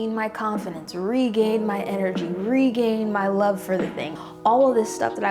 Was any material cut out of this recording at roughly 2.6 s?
no; 1 cut; at 4.1 s

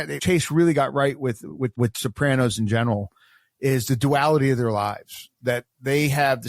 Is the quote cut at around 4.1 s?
no; 1 cut; at 1.7 s

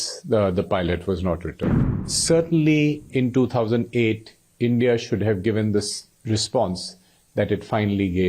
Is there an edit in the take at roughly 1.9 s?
yes; 1 cut; at 1.9 s

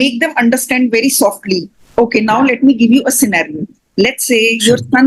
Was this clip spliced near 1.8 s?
yes; 1 cut; at 1.8 s

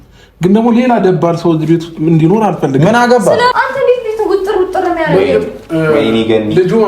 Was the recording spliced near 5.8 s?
no; 1 cut; at 3.5 s

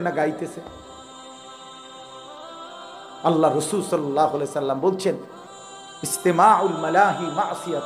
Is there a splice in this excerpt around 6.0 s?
no; 0 cuts

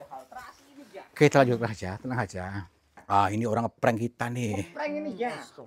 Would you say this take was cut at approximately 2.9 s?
yes; 1 cut; at 2.9 s

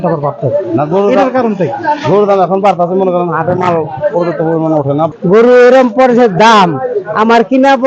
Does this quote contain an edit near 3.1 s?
no; 1 cut; at 5.1 s

